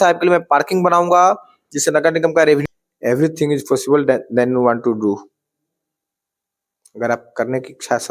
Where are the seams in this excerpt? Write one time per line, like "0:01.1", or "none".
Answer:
0:02.6